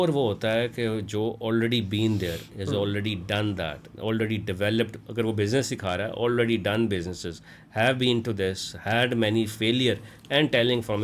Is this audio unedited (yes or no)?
yes